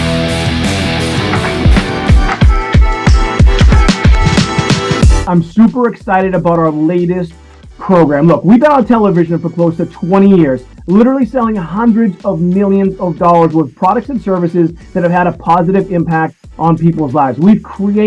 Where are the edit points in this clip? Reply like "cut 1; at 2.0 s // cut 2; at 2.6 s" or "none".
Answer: cut 1; at 1.3 s